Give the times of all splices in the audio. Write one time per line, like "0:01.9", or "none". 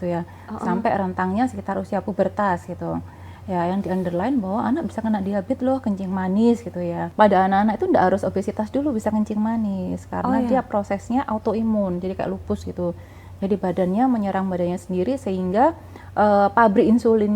0:07.0